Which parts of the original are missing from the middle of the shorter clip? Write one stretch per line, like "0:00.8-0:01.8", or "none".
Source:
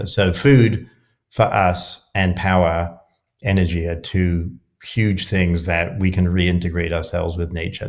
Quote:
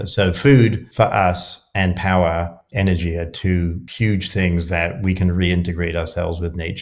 0:00.8-0:01.2
0:03.0-0:03.3
0:04.5-0:04.8